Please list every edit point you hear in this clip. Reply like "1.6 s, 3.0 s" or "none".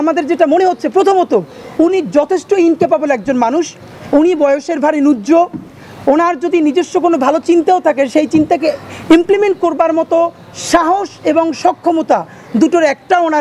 none